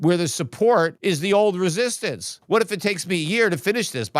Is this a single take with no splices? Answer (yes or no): no